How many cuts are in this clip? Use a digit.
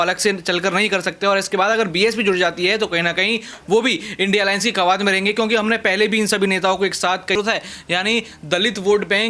1